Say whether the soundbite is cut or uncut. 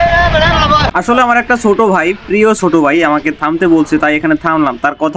cut